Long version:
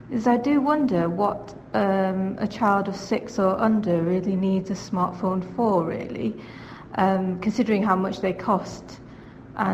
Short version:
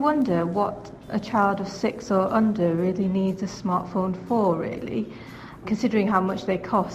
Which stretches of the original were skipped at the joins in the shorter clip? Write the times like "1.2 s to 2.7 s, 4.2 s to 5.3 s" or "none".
1.7 s to 2.3 s, 6.9 s to 7.4 s